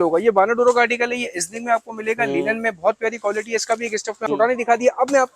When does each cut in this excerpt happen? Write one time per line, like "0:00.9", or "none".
0:04.2